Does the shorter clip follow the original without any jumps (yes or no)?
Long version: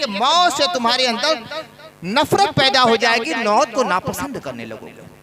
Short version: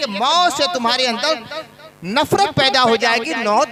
yes